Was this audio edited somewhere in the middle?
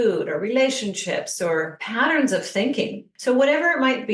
yes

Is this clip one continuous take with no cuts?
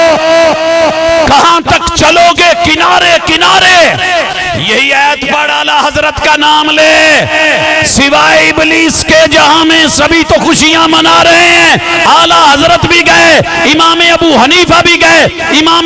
no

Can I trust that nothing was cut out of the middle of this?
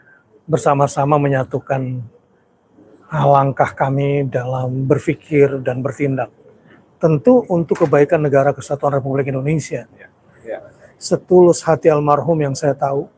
no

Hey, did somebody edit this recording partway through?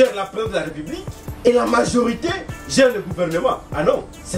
yes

